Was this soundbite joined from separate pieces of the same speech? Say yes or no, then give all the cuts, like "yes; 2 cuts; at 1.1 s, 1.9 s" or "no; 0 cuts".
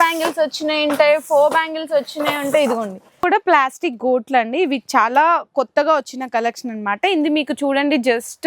yes; 1 cut; at 3.2 s